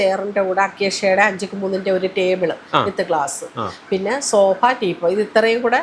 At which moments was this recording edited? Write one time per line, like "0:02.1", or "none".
none